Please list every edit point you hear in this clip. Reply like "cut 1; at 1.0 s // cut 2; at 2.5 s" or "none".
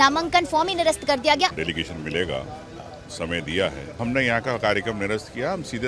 cut 1; at 1.5 s // cut 2; at 4.0 s

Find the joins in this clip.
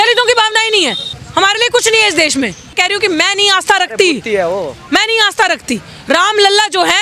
cut 1; at 1.2 s // cut 2; at 2.7 s

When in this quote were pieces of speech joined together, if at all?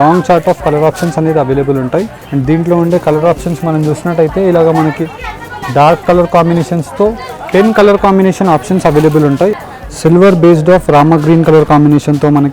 cut 1; at 2.2 s // cut 2; at 9.6 s

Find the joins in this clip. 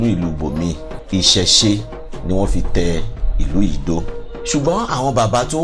cut 1; at 0.9 s // cut 2; at 4.2 s

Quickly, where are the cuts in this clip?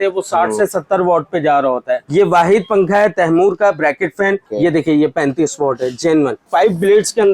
cut 1; at 2.1 s // cut 2; at 4.5 s // cut 3; at 6.4 s

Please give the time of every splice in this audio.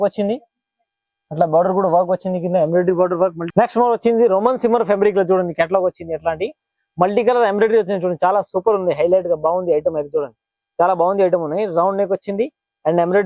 cut 1; at 3.4 s

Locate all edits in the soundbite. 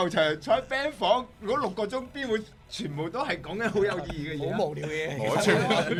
none

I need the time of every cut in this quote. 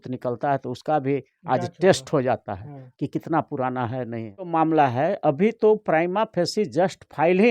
cut 1; at 4.5 s

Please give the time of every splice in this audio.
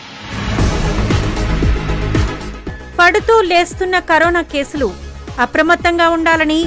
cut 1; at 1.1 s

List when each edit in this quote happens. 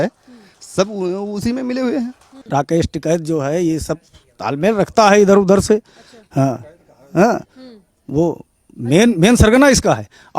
cut 1; at 2.4 s

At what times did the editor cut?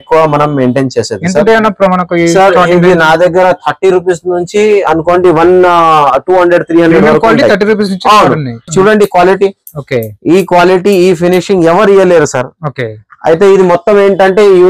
cut 1; at 8.7 s

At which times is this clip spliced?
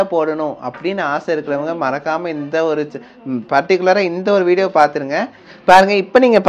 cut 1; at 5.1 s

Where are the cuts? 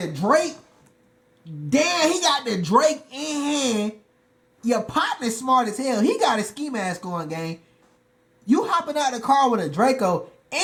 none

